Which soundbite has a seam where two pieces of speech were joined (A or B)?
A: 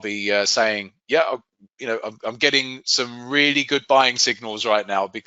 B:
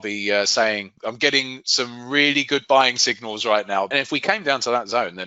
B